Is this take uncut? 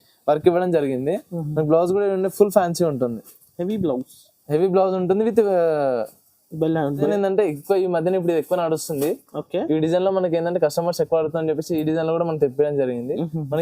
no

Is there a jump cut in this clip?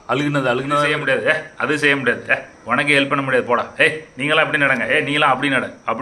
yes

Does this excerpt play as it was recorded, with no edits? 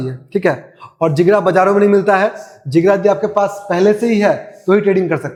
yes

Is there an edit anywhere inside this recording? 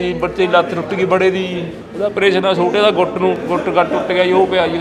no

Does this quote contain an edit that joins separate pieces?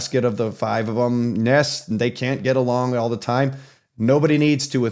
no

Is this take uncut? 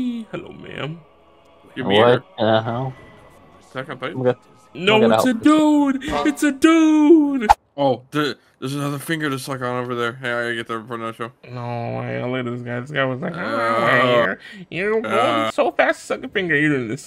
no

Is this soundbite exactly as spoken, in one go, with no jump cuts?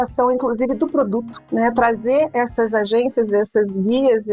no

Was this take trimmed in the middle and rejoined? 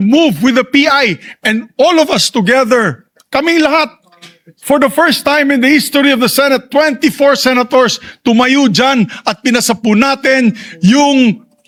no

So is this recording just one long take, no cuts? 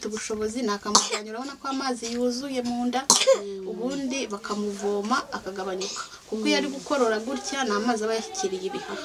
yes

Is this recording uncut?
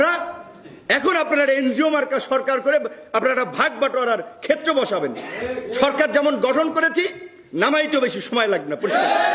yes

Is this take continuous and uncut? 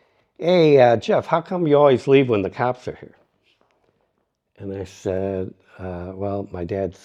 yes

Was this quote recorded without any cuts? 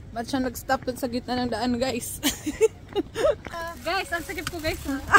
no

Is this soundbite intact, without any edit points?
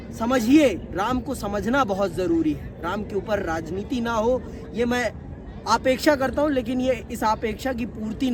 yes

